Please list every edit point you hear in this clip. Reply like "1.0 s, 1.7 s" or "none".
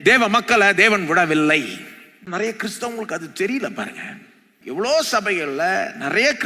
2.3 s

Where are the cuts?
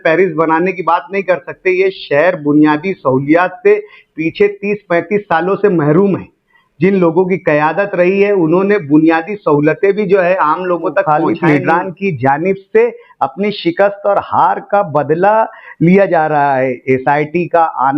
11.0 s

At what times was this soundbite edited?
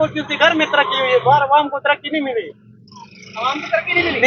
none

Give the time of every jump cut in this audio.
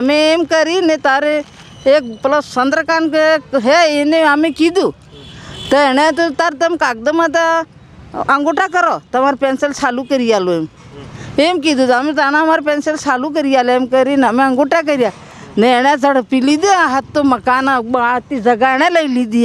none

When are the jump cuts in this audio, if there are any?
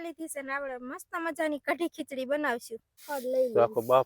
2.9 s

